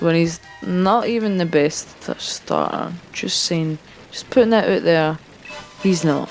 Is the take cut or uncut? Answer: uncut